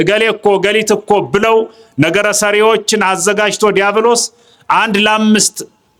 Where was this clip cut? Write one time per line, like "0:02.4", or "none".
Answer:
none